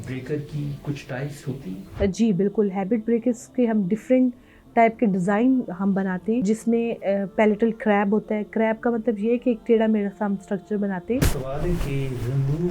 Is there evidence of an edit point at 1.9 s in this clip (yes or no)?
yes